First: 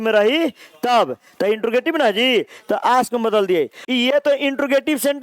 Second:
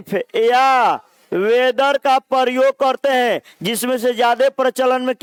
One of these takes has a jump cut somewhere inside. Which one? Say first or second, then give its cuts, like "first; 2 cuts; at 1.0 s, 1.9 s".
first; 1 cut; at 3.8 s